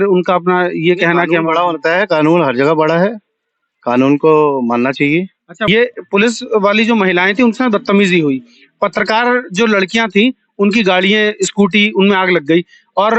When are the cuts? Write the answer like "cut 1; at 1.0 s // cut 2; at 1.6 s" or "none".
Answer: cut 1; at 5.6 s

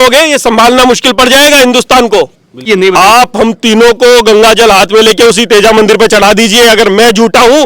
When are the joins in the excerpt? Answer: cut 1; at 2.7 s

